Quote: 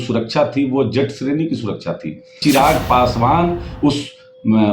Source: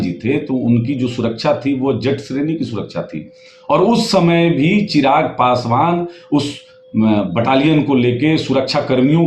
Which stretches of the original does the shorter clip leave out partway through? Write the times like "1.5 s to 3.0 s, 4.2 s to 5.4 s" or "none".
3.5 s to 4.9 s